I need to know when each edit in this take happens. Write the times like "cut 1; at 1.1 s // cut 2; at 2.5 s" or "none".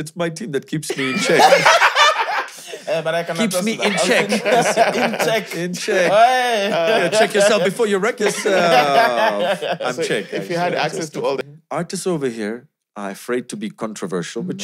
cut 1; at 11.5 s